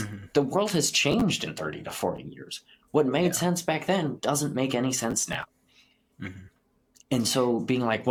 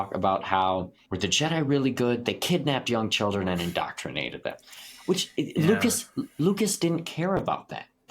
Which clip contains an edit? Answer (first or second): second